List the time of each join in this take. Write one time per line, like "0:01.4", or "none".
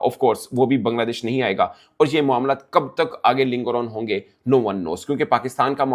none